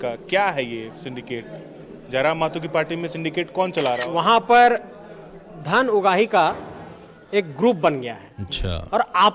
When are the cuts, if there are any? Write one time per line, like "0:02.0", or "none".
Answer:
0:04.0

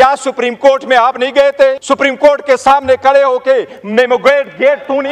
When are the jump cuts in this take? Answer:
0:01.8

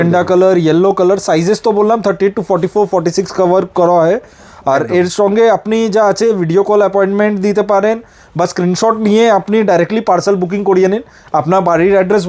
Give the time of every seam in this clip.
none

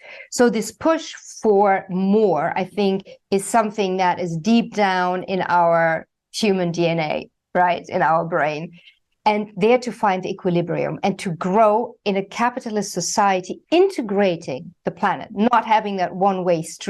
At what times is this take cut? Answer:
none

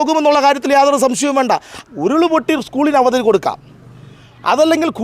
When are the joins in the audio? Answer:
0:01.8

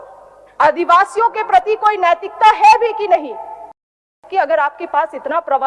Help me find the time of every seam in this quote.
0:04.1

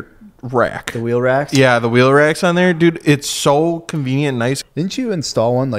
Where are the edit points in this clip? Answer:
0:04.6

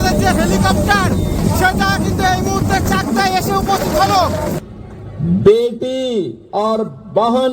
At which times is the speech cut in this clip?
0:04.6

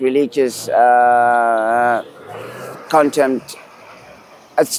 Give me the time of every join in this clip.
none

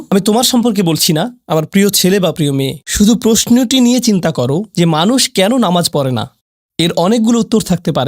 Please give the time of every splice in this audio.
none

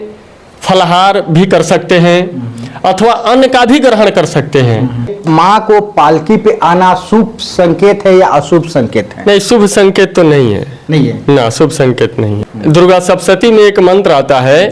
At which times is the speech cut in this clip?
0:05.1
0:12.4

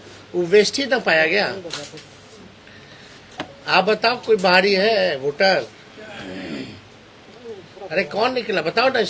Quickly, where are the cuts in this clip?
none

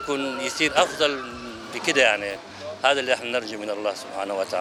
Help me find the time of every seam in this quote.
none

